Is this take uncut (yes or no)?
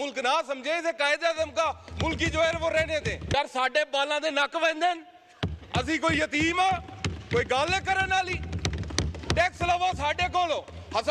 no